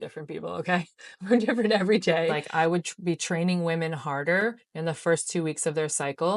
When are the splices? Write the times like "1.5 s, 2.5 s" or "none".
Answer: 2.3 s